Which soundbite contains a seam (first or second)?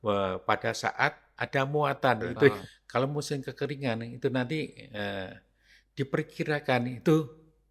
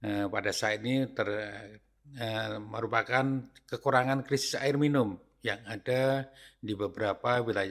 first